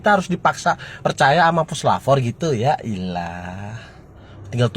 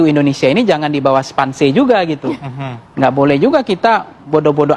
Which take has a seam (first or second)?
first